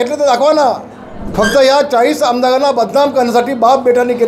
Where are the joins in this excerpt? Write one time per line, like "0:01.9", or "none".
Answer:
0:01.2